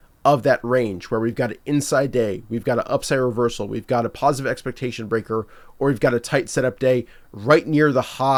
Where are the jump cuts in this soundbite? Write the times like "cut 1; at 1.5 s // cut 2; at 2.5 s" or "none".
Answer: none